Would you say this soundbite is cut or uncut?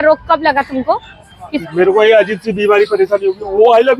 cut